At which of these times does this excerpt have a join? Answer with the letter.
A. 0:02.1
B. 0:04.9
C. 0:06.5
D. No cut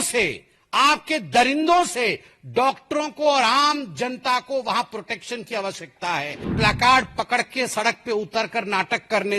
C